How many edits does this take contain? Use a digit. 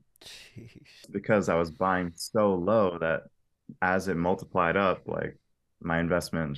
1